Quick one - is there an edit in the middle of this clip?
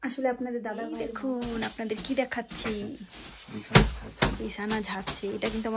yes; 1 cut; at 0.9 s

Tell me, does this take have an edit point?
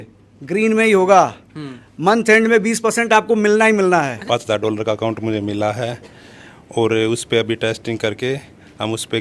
yes; 1 cut; at 4.2 s

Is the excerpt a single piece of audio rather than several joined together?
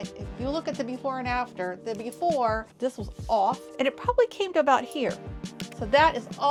yes; 0 cuts

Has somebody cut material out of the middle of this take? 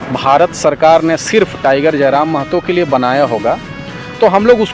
no; 0 cuts

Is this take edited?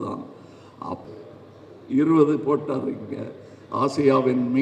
yes; 1 cut; at 1.0 s

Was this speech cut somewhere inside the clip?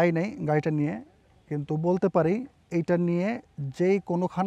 no; 0 cuts

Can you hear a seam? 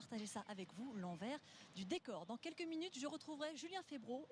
no; 0 cuts

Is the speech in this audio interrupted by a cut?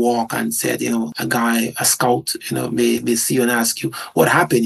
yes; 1 cut; at 1.1 s

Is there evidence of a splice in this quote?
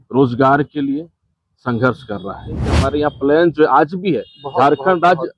yes; 1 cut; at 2.7 s

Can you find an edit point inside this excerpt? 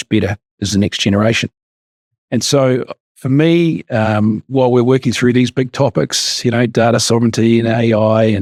no; 0 cuts

